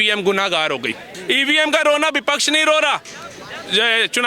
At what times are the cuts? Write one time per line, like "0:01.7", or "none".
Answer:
0:01.1